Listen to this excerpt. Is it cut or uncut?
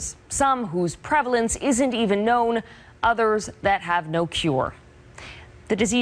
cut